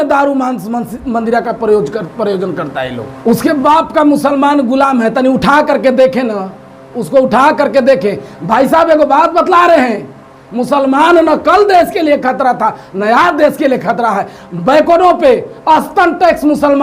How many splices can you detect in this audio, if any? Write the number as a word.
one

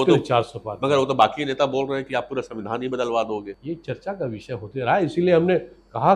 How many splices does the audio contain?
one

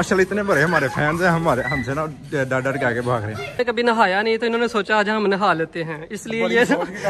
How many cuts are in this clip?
one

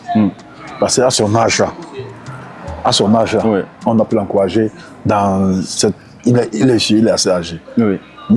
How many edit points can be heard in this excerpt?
zero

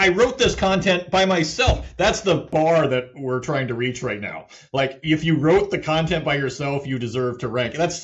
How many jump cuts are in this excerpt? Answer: one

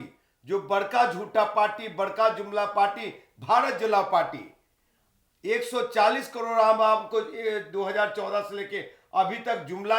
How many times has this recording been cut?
zero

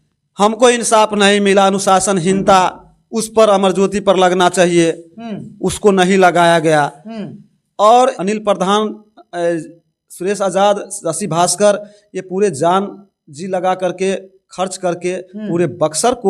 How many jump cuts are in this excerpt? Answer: one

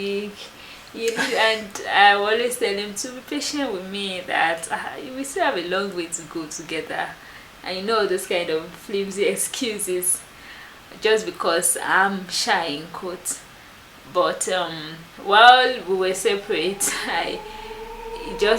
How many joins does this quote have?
one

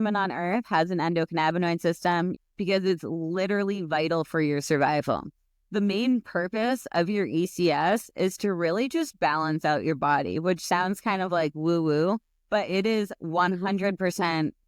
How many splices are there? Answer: one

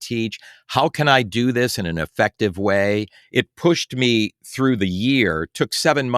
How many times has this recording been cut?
one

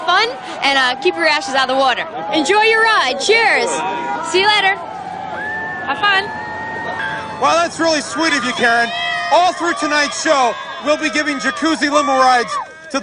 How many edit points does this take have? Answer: zero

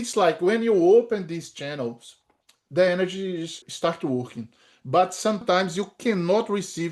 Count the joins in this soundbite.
two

